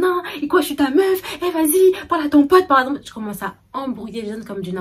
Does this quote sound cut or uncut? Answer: uncut